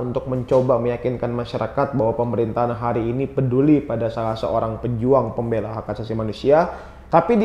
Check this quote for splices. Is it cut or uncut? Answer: uncut